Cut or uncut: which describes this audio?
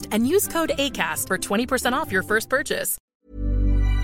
cut